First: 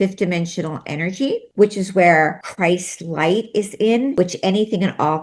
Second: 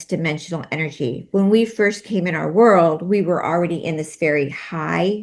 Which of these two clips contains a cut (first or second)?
first